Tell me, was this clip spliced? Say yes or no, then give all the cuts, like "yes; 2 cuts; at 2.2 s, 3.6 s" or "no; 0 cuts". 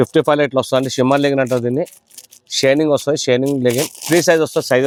no; 0 cuts